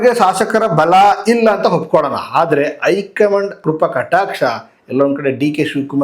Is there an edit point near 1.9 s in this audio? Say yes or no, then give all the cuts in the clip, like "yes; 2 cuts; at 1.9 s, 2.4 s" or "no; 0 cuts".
no; 1 cut; at 3.6 s